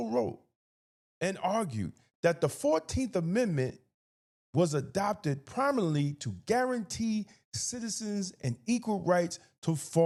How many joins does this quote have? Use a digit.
0